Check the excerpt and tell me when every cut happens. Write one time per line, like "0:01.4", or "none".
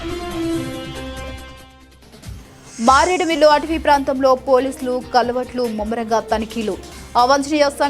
0:01.2
0:02.7